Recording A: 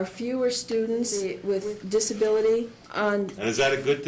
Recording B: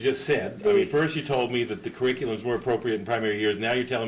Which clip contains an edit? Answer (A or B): A